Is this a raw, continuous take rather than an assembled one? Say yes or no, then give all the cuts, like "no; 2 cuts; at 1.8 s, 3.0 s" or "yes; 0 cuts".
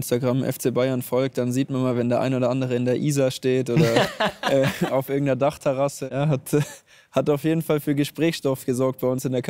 no; 1 cut; at 6.0 s